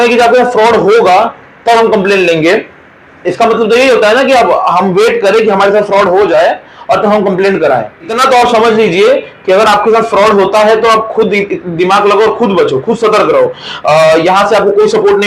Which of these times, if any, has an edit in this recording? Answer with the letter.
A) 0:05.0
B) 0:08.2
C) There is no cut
B